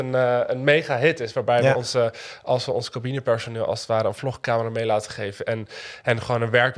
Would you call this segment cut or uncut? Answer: uncut